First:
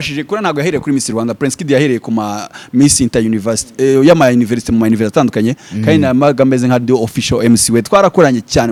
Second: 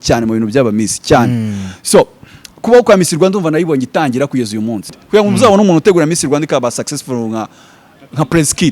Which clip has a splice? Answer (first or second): second